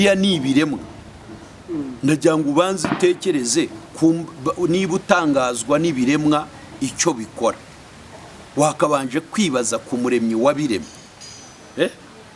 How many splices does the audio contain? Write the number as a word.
zero